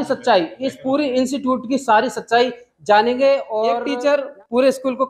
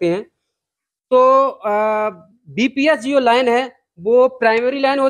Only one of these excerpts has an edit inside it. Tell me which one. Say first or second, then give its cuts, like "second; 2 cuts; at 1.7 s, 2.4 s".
first; 1 cut; at 3.8 s